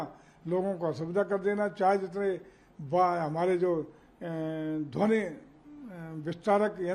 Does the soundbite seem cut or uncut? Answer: uncut